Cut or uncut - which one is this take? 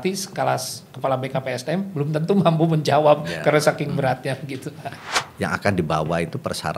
cut